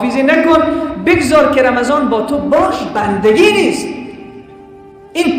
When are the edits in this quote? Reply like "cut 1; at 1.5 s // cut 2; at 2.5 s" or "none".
cut 1; at 2.9 s